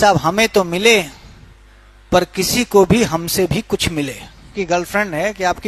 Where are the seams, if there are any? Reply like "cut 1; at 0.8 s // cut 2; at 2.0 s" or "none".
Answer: cut 1; at 4.5 s